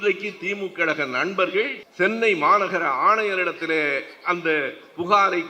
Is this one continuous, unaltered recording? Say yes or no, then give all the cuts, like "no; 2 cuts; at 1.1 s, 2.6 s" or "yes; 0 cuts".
no; 1 cut; at 1.8 s